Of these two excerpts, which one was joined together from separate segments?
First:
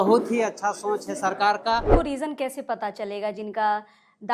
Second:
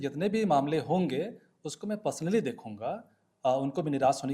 first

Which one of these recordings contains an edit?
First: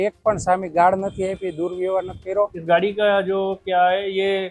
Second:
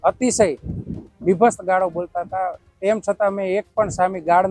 first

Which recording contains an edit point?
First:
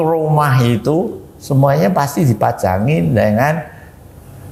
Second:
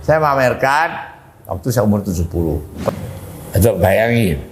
second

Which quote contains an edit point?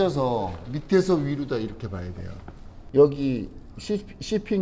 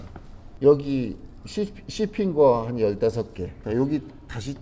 second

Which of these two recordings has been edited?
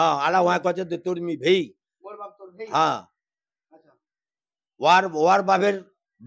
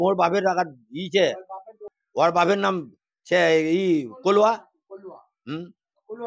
second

